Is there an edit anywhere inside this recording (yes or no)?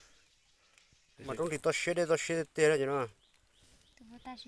yes